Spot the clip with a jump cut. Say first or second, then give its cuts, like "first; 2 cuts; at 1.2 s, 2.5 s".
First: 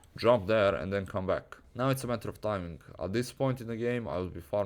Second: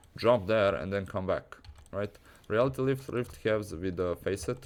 first; 1 cut; at 1.6 s